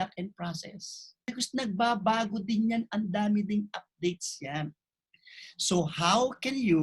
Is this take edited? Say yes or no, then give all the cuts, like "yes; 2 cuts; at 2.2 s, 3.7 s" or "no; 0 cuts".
yes; 1 cut; at 1.3 s